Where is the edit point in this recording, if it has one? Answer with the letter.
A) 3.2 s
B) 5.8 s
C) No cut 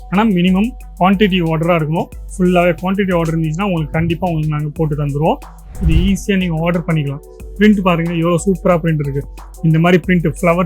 B